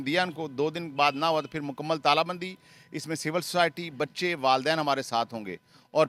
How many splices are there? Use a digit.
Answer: 0